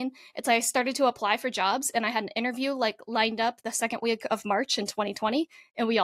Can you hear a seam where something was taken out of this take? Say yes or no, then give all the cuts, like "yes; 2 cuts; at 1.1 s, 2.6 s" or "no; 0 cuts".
no; 0 cuts